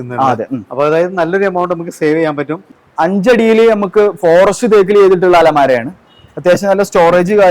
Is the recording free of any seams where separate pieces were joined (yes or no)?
no